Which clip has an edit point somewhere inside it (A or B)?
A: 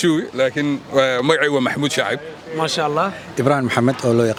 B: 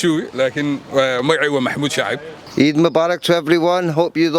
B